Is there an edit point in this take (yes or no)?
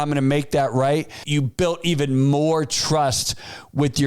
yes